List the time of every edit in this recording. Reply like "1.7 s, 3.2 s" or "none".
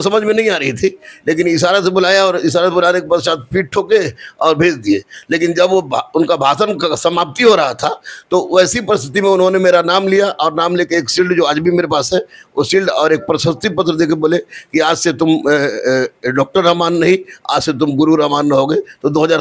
none